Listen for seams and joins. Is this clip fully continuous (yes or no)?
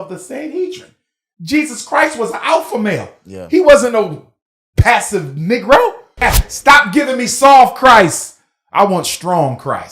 no